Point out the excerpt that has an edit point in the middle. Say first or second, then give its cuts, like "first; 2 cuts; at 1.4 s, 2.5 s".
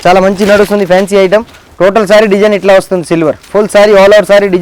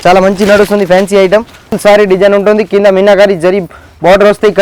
second; 1 cut; at 1.8 s